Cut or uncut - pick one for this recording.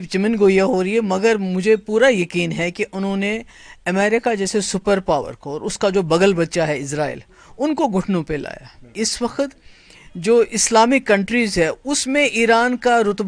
cut